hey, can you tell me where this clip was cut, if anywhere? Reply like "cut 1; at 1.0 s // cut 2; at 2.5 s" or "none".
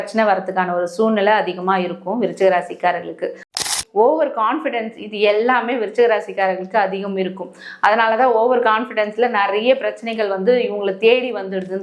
cut 1; at 3.6 s